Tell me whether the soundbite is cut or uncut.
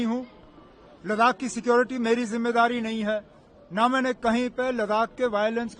uncut